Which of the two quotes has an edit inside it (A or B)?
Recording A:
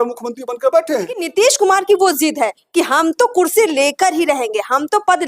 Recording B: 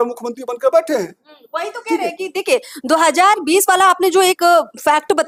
A